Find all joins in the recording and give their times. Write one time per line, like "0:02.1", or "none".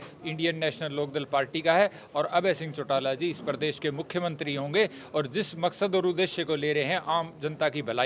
none